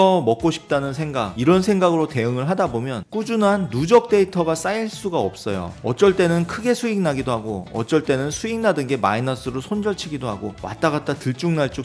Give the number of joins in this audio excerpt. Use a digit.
1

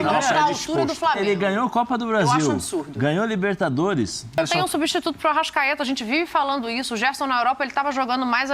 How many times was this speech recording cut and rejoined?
1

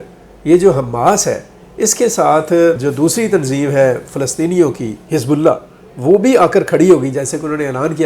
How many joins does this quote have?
1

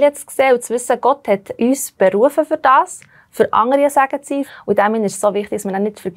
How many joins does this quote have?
2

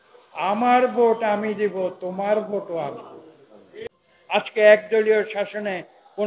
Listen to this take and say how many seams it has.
1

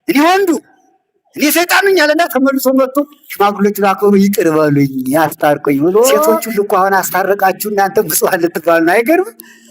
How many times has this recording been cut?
1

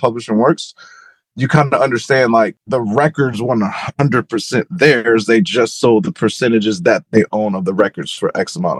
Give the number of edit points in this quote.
0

